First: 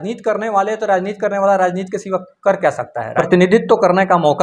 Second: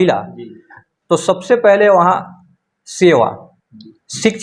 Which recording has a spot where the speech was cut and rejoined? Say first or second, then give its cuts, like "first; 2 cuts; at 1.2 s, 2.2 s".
first; 1 cut; at 3.0 s